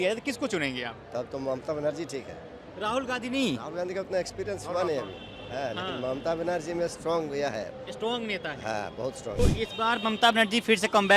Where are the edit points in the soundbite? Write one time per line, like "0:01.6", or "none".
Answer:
0:09.4